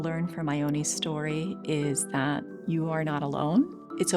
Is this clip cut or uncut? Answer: cut